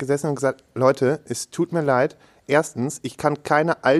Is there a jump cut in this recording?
no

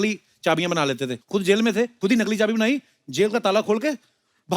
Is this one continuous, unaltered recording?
no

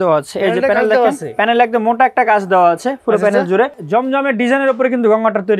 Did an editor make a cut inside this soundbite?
no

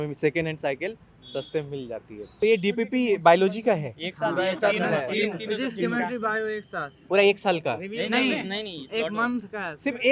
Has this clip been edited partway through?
yes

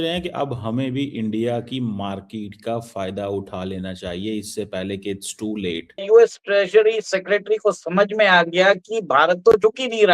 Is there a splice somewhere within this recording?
yes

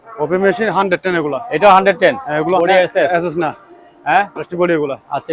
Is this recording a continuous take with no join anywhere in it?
no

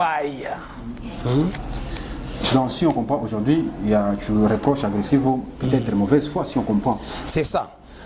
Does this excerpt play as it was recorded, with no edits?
yes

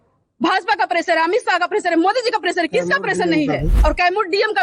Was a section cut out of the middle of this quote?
yes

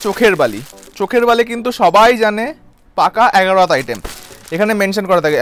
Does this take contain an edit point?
no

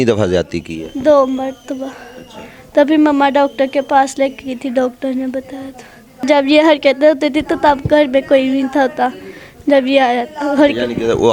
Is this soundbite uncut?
no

